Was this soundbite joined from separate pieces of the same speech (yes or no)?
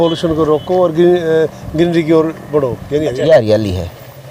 yes